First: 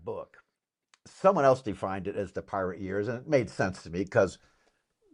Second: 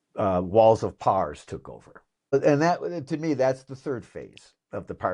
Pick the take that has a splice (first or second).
second